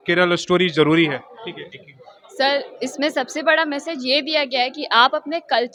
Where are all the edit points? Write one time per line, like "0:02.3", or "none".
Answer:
none